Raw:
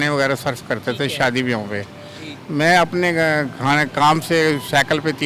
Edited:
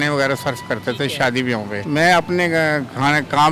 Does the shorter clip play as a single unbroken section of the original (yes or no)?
no